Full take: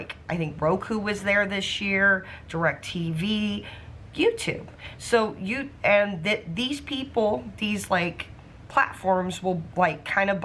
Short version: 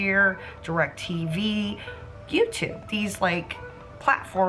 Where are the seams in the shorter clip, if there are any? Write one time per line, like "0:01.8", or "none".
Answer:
0:02.8